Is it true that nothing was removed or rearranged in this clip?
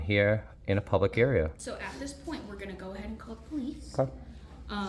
no; 1 cut; at 1.6 s

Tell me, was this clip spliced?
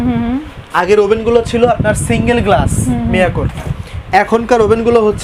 no; 0 cuts

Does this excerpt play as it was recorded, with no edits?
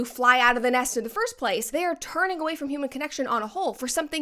no; 1 cut; at 1.6 s

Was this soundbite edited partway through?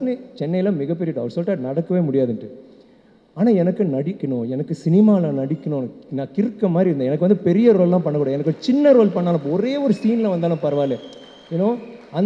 no; 0 cuts

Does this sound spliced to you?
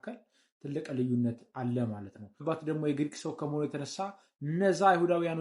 yes; 1 cut; at 2.4 s

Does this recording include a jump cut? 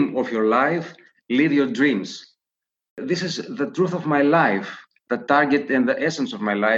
yes; 1 cut; at 3.0 s

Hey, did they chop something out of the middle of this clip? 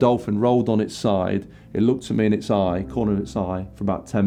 no; 0 cuts

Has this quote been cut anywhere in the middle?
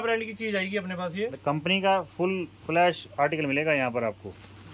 no; 0 cuts

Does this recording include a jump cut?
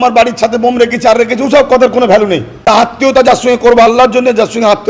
yes; 1 cut; at 2.5 s

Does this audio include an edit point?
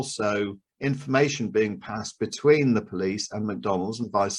no; 0 cuts

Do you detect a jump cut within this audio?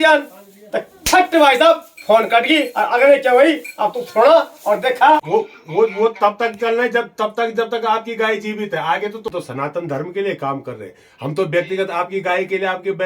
yes; 2 cuts; at 5.2 s, 9.3 s

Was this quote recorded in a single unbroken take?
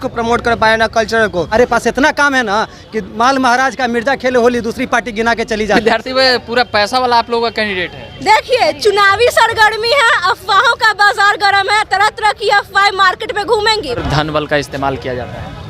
no; 3 cuts; at 1.5 s, 5.8 s, 14.0 s

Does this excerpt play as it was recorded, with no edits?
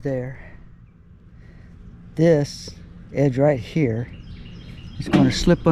yes; 0 cuts

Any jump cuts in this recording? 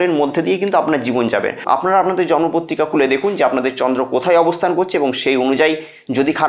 yes; 1 cut; at 1.6 s

